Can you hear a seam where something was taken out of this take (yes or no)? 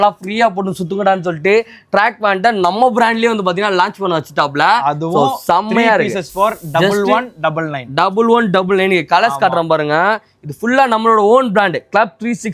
no